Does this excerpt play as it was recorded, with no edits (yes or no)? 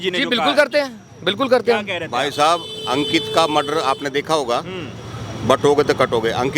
yes